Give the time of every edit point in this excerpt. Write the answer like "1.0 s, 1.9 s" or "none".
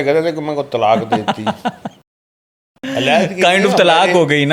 none